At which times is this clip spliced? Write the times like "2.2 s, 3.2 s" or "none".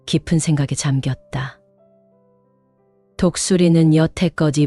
1.6 s, 3.2 s